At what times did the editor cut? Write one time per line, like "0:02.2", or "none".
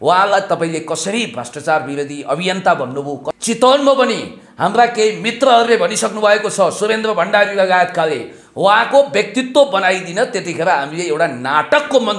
0:03.3